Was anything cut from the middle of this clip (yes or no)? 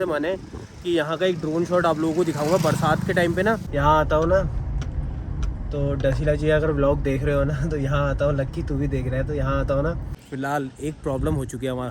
yes